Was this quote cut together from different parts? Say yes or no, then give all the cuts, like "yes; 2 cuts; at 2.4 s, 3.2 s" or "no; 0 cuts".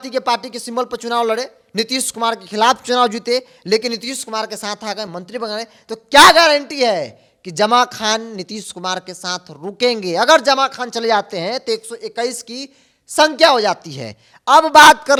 no; 0 cuts